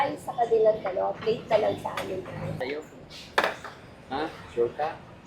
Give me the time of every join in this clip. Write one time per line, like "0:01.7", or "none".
0:02.6